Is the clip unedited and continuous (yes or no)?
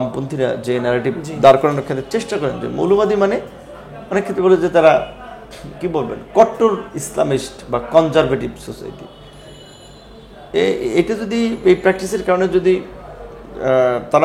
yes